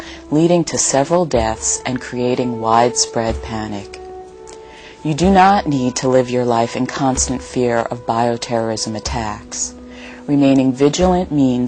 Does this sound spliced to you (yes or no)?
no